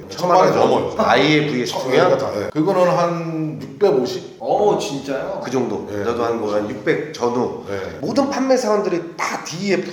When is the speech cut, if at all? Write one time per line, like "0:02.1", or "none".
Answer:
0:00.9
0:02.5